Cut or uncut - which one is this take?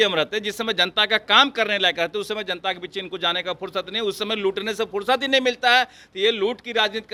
uncut